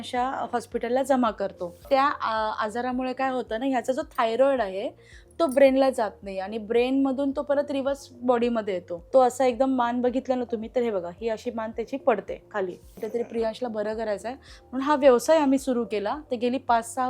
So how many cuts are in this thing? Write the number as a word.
three